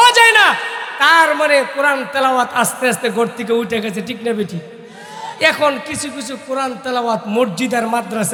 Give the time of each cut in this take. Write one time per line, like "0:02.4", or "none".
none